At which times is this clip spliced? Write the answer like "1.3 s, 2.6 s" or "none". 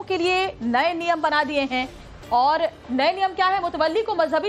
none

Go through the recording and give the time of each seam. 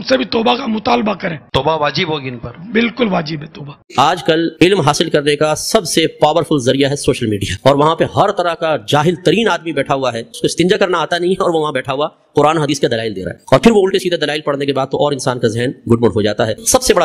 3.8 s

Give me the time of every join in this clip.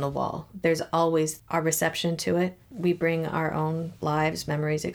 1.4 s, 2.6 s

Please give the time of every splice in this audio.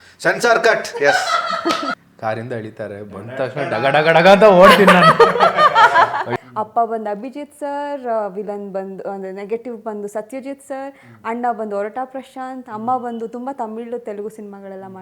1.9 s, 6.3 s

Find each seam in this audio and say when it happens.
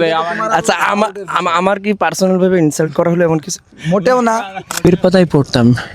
4.8 s

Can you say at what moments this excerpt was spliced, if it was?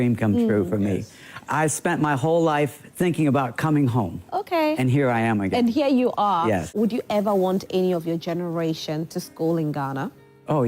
6.7 s

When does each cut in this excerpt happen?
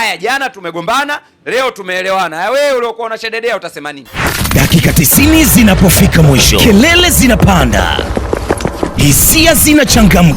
4.2 s

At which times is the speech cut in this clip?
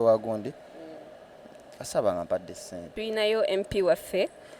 2.9 s

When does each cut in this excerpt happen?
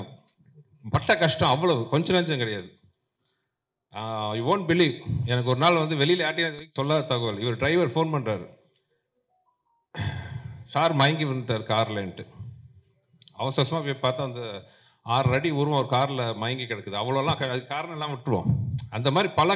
none

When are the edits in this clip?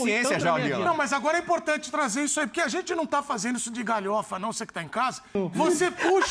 5.3 s

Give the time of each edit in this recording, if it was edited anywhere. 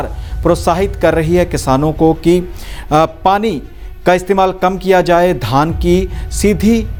none

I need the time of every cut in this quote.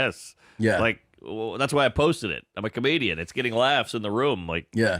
3.1 s

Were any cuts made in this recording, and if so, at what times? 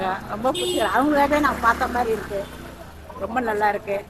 none

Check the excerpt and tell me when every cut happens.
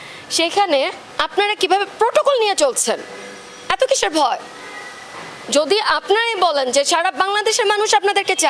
1.0 s

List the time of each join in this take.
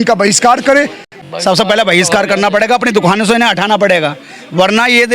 1.0 s

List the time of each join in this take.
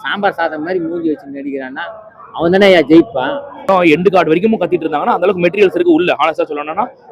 3.6 s

